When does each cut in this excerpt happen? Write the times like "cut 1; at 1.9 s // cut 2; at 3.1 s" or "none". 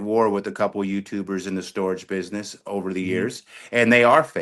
none